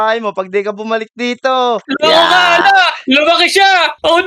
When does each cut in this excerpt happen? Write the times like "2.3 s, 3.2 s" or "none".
none